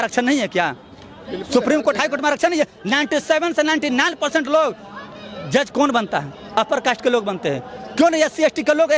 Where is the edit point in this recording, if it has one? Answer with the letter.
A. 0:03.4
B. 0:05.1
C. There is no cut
C